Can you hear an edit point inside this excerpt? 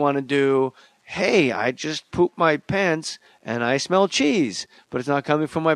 yes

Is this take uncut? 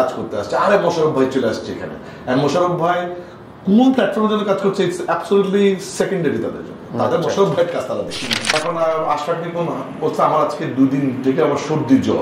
no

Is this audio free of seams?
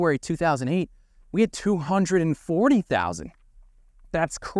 yes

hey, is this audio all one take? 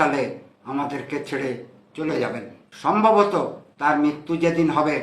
no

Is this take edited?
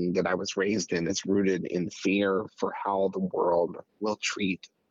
no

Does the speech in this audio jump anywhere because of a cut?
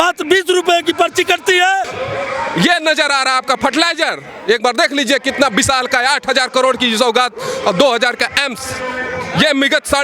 yes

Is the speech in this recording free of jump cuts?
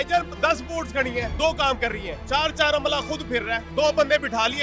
no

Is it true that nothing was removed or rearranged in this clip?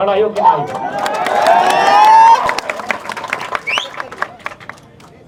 yes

